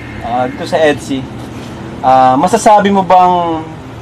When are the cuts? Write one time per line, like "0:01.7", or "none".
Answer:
none